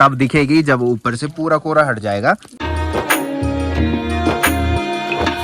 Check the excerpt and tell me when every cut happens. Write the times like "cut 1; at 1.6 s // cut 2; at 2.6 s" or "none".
none